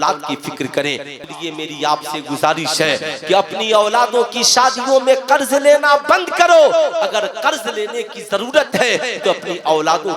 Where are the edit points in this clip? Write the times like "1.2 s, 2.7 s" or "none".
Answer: 1.2 s